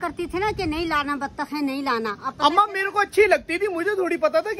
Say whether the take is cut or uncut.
uncut